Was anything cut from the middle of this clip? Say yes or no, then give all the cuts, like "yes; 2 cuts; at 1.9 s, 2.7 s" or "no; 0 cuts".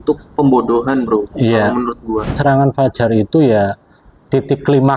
yes; 1 cut; at 2.4 s